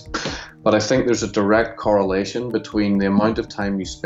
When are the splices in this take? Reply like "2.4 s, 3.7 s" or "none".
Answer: none